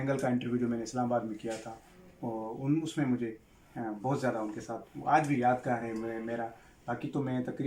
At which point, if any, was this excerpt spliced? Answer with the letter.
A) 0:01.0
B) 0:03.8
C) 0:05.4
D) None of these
D